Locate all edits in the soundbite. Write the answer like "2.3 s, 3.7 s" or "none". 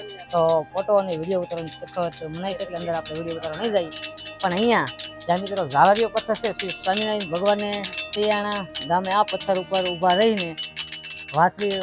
8.2 s